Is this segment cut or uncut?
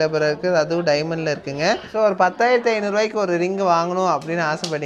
cut